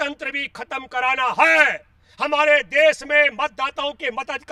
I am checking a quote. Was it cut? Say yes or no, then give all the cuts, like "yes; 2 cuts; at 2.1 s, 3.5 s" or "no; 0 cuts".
no; 0 cuts